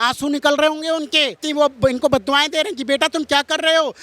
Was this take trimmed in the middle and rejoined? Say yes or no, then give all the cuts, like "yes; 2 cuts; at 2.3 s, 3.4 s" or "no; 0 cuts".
yes; 1 cut; at 1.4 s